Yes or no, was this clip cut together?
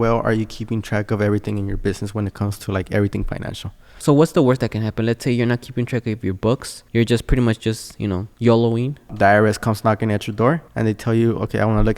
yes